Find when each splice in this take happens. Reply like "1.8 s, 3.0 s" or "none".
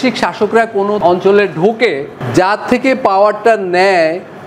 1.0 s, 2.1 s